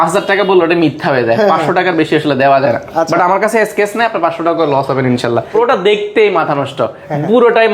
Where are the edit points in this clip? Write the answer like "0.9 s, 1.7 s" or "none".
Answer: 5.5 s